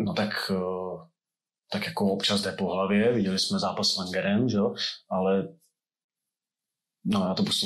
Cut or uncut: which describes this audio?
uncut